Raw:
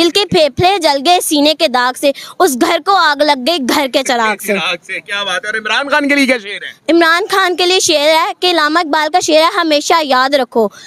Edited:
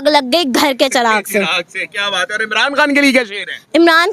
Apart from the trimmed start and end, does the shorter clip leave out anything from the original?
no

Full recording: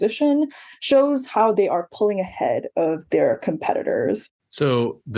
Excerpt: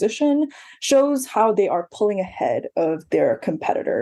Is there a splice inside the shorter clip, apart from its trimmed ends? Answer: no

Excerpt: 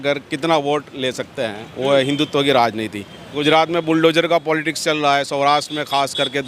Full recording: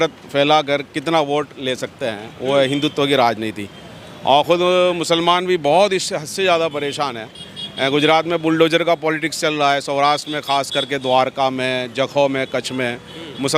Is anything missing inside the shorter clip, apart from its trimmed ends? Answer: yes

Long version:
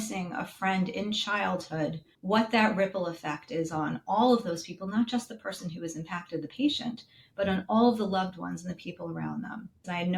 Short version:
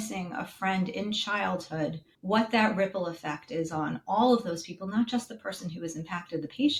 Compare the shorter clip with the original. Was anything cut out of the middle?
no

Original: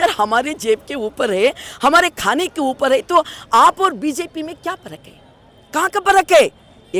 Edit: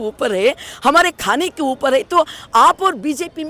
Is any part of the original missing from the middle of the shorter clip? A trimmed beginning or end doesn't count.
no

